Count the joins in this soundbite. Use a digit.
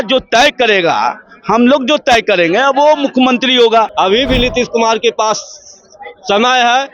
1